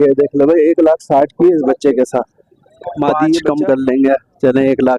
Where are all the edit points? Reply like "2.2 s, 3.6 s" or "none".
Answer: 3.4 s